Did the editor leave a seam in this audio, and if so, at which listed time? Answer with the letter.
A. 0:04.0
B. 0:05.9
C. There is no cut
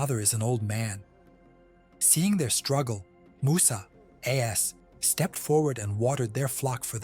C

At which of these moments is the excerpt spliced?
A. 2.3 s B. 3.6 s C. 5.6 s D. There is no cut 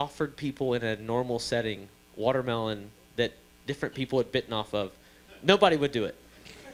D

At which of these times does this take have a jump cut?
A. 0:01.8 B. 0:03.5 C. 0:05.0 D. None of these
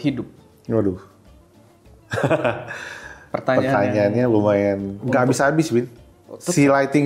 C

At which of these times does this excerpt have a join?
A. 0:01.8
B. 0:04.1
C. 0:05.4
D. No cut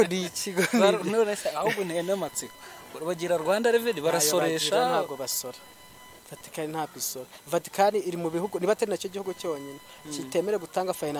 D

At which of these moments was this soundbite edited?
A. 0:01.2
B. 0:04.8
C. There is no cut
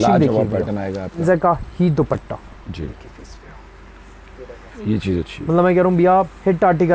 A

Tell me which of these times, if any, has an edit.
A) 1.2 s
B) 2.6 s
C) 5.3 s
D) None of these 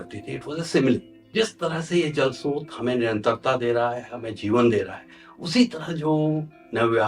A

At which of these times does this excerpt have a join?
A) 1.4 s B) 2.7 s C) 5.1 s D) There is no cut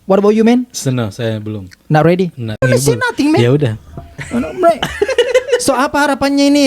B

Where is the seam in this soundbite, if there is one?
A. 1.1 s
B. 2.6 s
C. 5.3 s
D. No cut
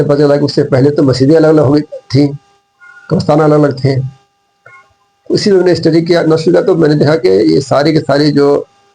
D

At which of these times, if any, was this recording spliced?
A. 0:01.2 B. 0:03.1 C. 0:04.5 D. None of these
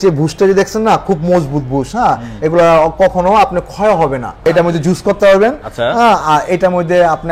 C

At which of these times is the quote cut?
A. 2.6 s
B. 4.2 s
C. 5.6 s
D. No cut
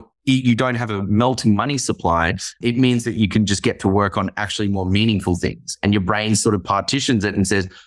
A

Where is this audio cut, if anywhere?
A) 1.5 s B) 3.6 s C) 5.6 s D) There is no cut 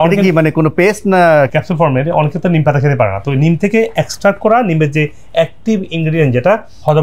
A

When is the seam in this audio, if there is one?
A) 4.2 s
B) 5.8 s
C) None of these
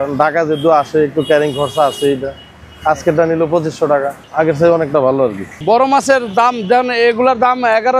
B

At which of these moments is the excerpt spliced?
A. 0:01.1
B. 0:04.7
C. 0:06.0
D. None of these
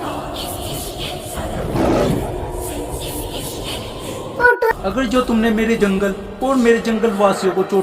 B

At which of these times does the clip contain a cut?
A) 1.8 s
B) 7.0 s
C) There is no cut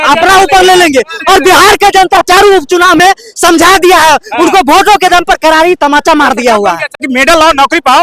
B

